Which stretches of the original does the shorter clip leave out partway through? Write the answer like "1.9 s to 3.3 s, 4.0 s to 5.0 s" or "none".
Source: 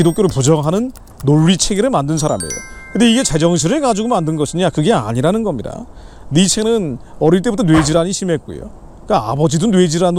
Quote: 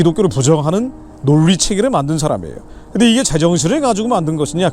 none